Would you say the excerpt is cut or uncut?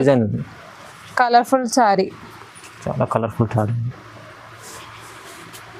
uncut